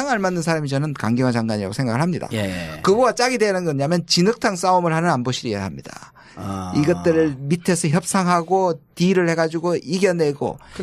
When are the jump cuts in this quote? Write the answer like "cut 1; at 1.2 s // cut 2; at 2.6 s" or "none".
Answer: cut 1; at 1.4 s